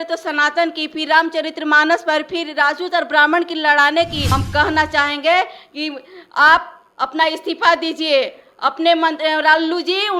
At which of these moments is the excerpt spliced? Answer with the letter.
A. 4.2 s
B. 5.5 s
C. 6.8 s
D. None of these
A